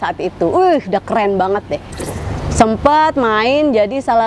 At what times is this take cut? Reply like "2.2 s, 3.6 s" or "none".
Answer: 1.9 s